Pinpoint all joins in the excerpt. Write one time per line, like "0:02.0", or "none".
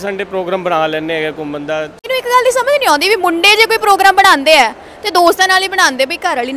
0:01.9

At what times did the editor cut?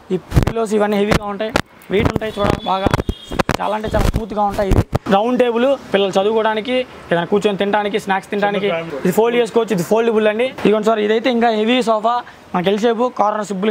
0:05.0
0:08.9
0:10.5

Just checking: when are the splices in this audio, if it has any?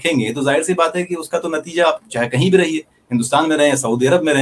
none

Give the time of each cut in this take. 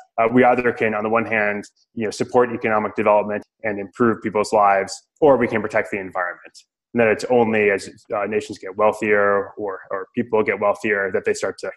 0:03.5
0:05.0

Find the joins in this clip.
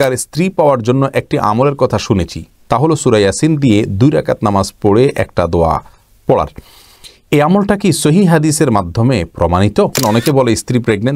0:10.0

